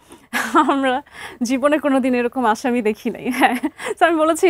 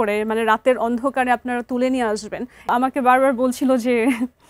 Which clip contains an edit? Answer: second; 1 cut; at 2.7 s

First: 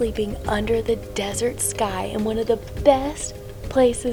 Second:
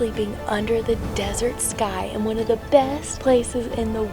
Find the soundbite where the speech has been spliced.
second; 1 cut; at 2.7 s

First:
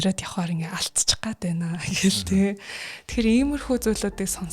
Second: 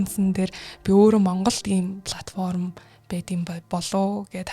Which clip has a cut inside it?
second; 1 cut; at 3.6 s

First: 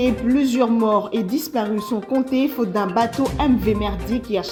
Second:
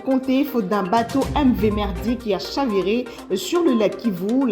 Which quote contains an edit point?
second; 1 cut; at 3.6 s

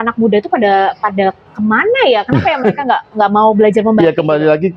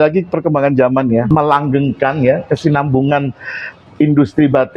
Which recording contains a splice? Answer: second; 1 cut; at 1.3 s

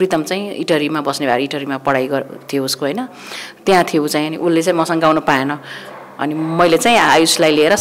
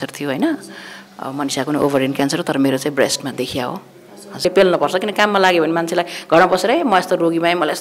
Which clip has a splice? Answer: second; 1 cut; at 4.4 s

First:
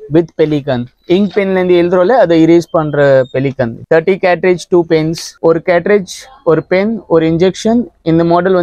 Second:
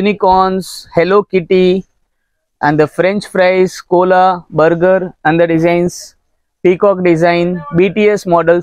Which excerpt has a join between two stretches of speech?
first; 1 cut; at 5.3 s

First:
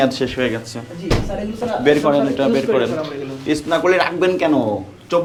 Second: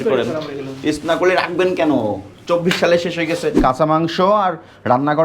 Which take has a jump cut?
second; 1 cut; at 3.6 s

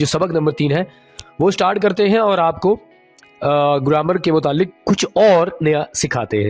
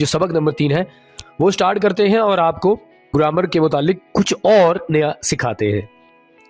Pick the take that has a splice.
second; 1 cut; at 3.1 s

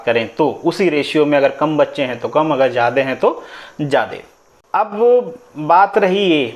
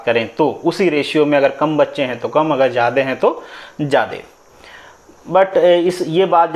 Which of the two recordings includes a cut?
first; 1 cut; at 4.5 s

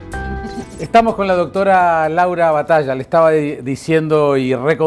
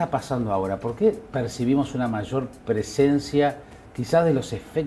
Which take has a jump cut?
second; 1 cut; at 1.2 s

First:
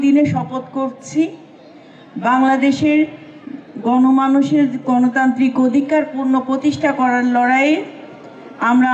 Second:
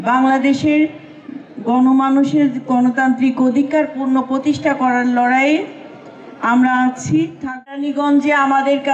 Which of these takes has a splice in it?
second; 1 cut; at 7.7 s

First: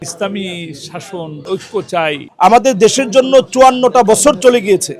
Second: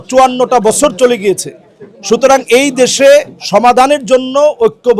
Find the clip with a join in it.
first; 1 cut; at 2.2 s

